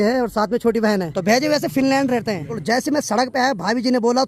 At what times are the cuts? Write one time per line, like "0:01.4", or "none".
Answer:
0:01.1
0:02.6